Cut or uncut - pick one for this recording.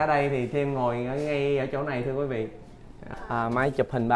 cut